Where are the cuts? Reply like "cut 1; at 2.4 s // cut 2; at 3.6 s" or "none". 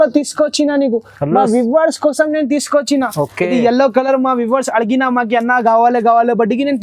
none